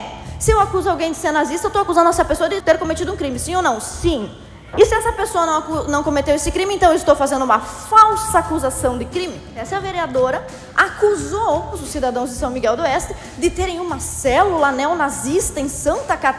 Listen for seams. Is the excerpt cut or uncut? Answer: cut